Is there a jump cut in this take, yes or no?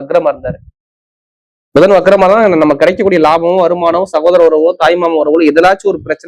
no